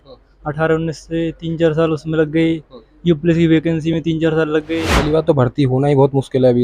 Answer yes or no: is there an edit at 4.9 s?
yes